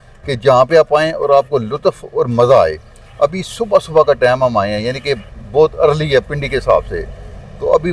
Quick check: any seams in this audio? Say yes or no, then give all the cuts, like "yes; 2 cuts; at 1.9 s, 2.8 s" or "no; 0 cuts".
no; 0 cuts